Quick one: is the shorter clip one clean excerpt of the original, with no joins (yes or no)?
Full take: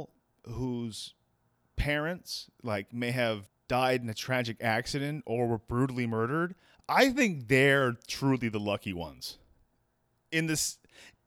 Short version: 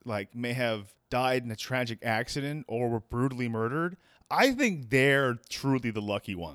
yes